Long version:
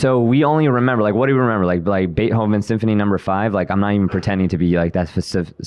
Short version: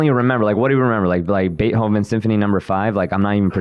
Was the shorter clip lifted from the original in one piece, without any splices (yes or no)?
yes